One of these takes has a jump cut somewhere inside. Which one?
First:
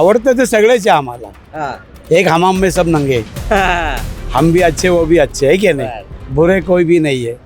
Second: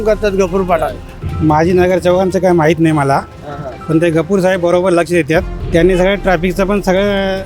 second; 2 cuts; at 1.1 s, 5.6 s

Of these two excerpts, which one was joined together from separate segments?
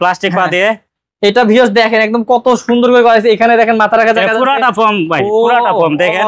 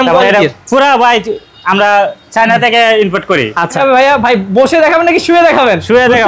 second; 1 cut; at 3.8 s

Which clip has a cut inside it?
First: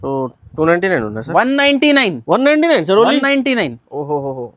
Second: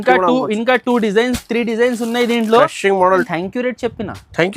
second; 1 cut; at 3.1 s

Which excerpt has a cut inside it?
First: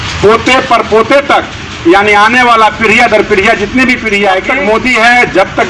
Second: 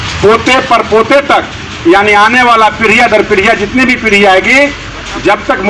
first; 1 cut; at 4.5 s

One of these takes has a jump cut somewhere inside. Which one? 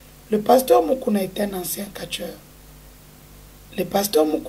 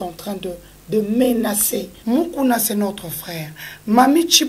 second; 1 cut; at 1.9 s

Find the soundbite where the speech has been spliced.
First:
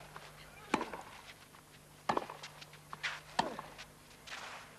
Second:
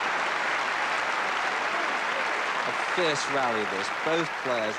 second; 1 cut; at 1.7 s

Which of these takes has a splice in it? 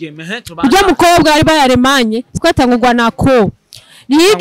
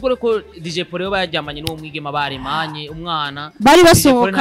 first; 1 cut; at 2.3 s

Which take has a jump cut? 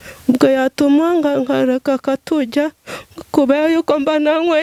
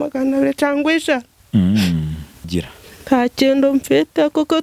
second; 1 cut; at 2.5 s

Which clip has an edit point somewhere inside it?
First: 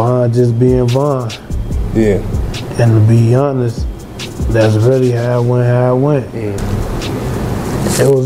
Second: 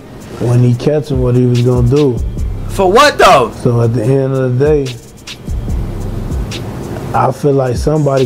first; 1 cut; at 6.6 s

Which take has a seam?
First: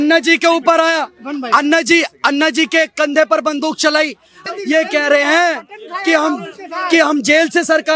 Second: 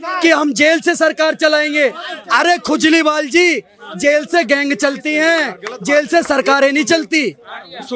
first; 1 cut; at 4.3 s

